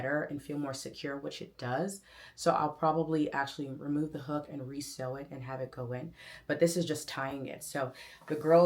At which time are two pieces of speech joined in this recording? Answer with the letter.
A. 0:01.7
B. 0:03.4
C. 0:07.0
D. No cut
D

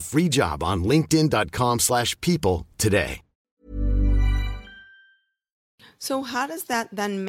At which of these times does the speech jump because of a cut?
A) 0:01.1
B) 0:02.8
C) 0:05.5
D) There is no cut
C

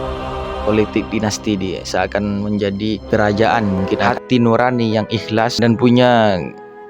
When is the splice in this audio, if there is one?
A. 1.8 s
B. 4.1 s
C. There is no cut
B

